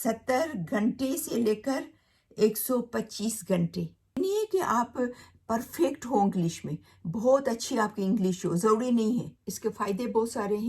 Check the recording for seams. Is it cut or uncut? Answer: cut